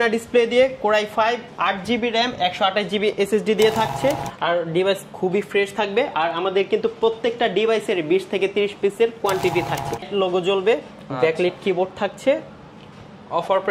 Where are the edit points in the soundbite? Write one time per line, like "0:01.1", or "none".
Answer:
0:04.3
0:10.1